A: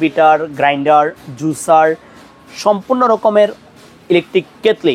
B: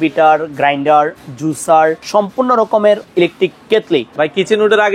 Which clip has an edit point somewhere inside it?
B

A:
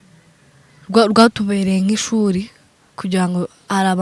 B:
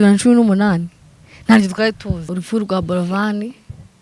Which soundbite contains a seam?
B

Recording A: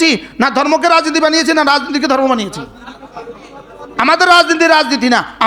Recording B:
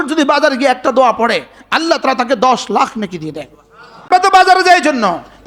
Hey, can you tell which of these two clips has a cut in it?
B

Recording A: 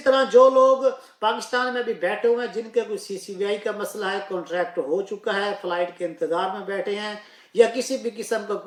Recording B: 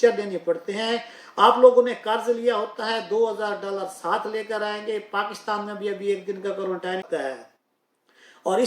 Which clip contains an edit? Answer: B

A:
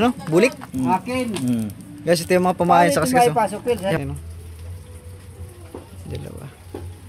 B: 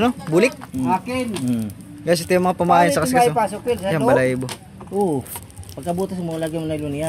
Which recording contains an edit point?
A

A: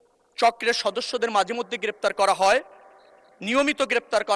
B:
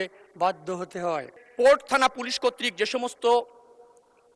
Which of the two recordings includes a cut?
B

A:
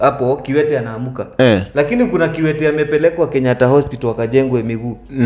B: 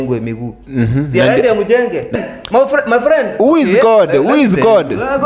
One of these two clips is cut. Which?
B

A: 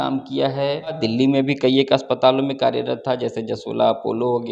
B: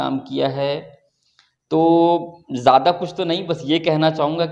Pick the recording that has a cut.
A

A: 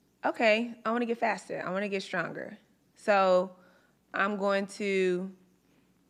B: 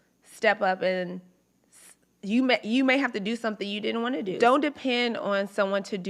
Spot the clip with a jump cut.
B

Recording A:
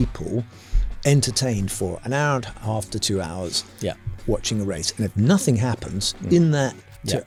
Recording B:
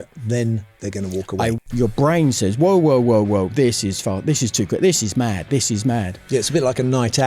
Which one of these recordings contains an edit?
B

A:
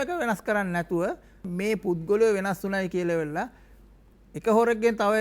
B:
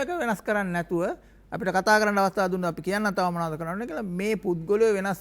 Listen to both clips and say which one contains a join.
A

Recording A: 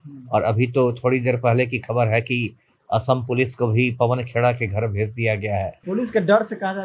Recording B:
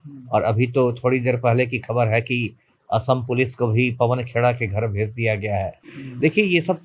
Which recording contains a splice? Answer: A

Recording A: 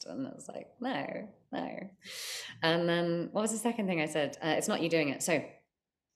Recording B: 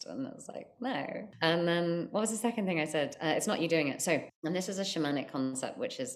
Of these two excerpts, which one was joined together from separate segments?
B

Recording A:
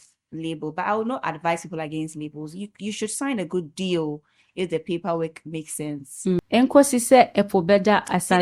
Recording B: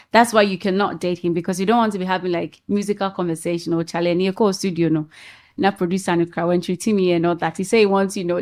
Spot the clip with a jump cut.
A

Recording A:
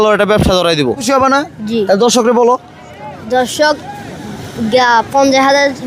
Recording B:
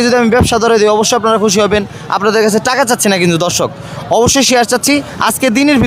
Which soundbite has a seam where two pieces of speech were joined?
A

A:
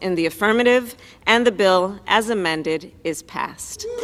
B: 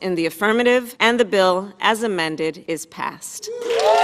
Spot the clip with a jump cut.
B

